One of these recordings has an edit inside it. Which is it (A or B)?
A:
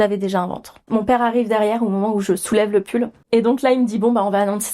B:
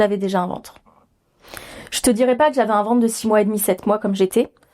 A